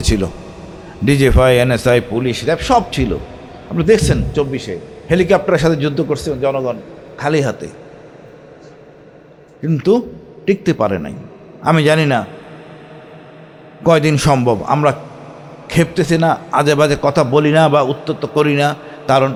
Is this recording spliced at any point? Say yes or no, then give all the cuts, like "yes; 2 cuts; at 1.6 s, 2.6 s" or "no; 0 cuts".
no; 0 cuts